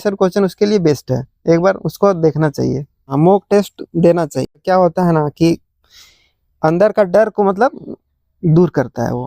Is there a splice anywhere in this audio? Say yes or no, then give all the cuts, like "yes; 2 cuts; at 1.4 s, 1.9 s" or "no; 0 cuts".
yes; 2 cuts; at 3.0 s, 4.6 s